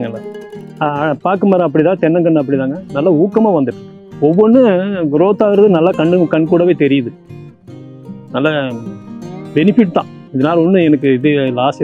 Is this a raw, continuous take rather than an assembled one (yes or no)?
yes